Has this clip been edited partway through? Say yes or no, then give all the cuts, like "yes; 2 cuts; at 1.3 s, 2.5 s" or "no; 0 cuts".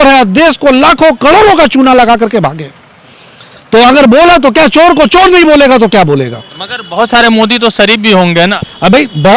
no; 0 cuts